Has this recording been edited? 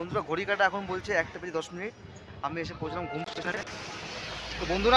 yes; 1 cut; at 3.4 s

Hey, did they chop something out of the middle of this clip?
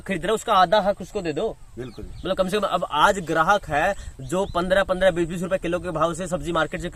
no; 0 cuts

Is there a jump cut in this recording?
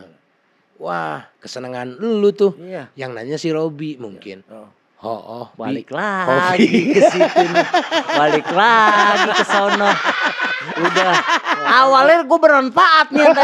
no; 0 cuts

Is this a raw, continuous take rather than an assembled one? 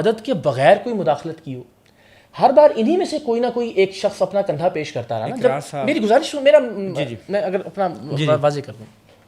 yes; 0 cuts

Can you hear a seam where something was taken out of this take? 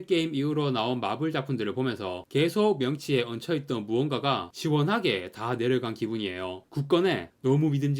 yes; 1 cut; at 6.6 s

